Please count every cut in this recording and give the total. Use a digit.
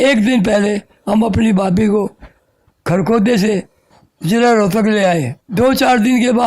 1